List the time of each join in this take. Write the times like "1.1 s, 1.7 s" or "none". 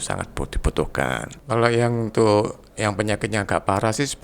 1.3 s